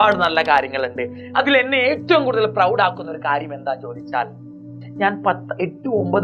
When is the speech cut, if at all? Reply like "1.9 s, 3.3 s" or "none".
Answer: 4.8 s